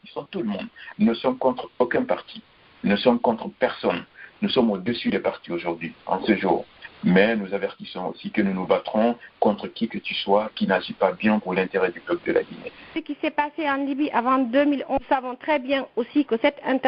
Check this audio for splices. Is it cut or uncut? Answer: cut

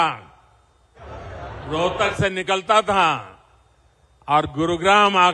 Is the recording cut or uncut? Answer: uncut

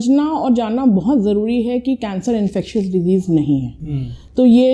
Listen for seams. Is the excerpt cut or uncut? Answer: uncut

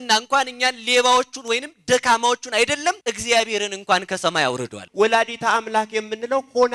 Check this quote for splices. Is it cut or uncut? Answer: cut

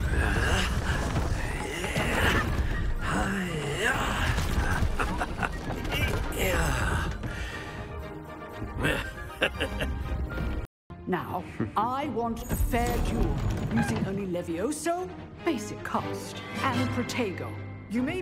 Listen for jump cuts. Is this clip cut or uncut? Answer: cut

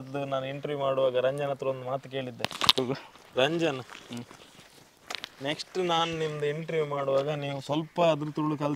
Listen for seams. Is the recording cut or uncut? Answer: uncut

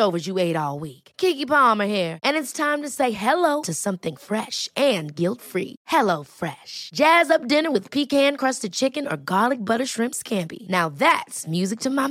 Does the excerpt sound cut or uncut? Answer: uncut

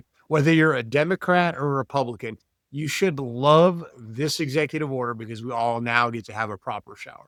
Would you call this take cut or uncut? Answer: uncut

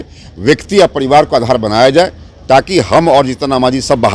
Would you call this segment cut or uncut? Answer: uncut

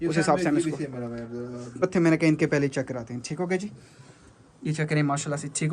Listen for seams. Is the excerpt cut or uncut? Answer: cut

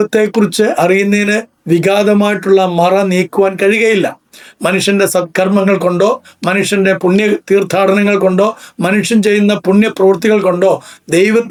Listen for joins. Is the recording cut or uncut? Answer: uncut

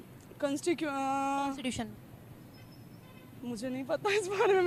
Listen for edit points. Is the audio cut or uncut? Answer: uncut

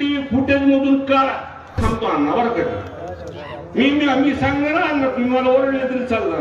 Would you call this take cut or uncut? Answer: cut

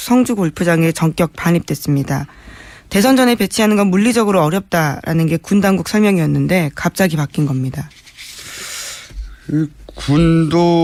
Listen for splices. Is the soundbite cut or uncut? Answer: uncut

